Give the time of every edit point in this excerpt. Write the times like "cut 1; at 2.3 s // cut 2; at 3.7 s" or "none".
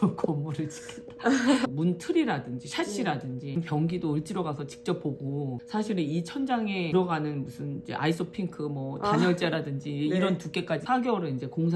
cut 1; at 1.7 s // cut 2; at 3.6 s // cut 3; at 5.5 s